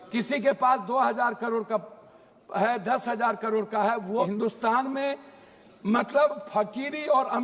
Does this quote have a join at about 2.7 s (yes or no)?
no